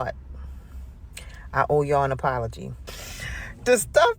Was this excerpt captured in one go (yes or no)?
no